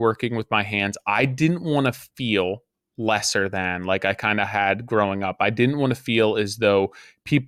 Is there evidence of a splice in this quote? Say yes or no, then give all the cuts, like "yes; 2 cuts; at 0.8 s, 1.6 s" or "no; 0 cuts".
no; 0 cuts